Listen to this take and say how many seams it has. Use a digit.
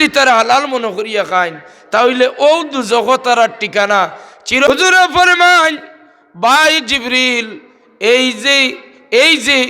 1